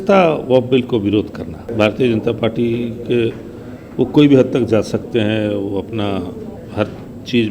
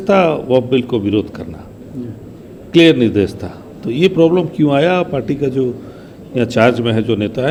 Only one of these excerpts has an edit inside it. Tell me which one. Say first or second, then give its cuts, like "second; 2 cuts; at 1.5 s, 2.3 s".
first; 2 cuts; at 1.7 s, 6.5 s